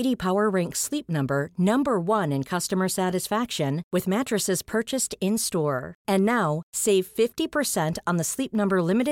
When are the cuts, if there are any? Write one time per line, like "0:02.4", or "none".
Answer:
none